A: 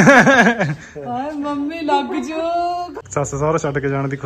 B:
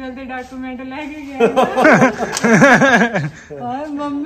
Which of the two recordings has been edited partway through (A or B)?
A